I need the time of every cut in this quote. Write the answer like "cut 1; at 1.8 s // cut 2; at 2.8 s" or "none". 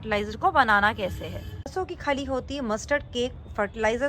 cut 1; at 1.7 s